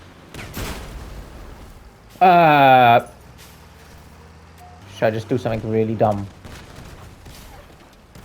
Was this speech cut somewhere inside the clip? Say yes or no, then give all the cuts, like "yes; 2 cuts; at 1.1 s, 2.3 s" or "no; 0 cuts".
yes; 1 cut; at 4.8 s